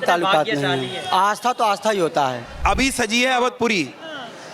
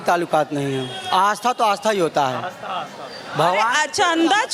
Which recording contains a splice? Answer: first; 1 cut; at 2.5 s

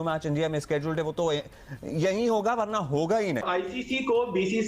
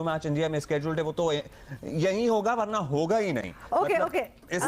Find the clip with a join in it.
first; 1 cut; at 3.5 s

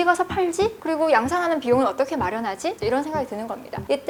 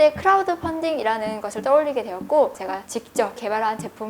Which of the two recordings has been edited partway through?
second; 1 cut; at 2.5 s

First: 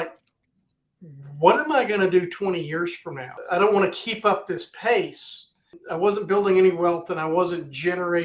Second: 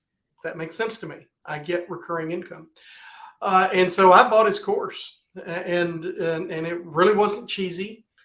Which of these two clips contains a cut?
first; 2 cuts; at 3.3 s, 5.8 s

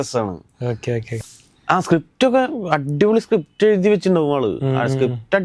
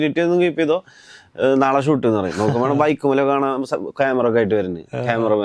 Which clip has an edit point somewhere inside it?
first; 1 cut; at 1.1 s

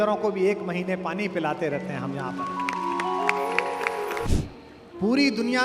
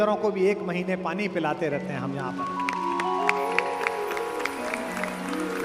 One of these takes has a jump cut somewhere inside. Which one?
first; 1 cut; at 4.3 s

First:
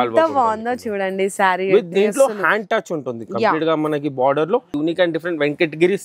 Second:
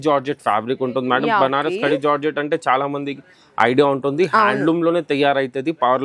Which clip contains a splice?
first; 1 cut; at 4.7 s

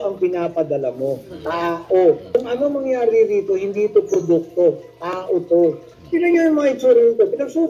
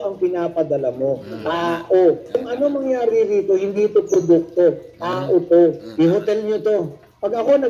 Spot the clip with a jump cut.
first; 1 cut; at 5.9 s

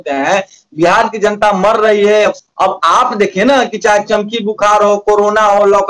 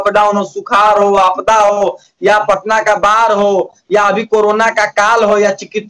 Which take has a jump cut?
first; 1 cut; at 2.4 s

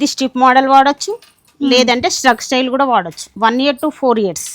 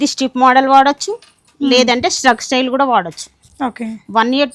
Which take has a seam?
first; 1 cut; at 3.2 s

